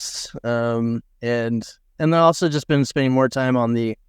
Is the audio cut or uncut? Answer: cut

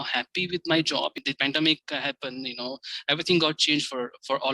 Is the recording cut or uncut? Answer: cut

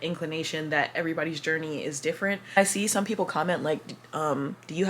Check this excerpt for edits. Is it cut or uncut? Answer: cut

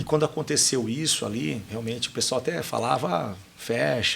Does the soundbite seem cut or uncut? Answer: cut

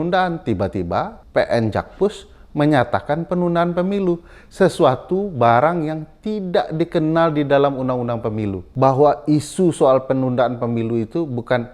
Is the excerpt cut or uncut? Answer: cut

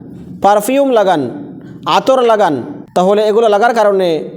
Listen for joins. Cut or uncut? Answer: cut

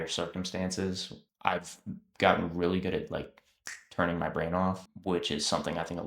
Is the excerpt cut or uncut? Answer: uncut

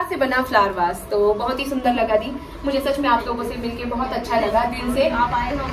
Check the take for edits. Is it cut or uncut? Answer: uncut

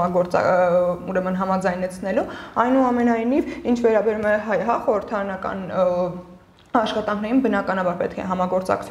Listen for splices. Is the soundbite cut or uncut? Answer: uncut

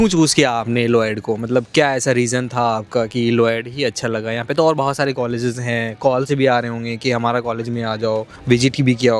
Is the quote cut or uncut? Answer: uncut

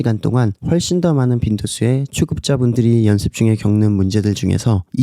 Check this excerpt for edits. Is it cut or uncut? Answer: cut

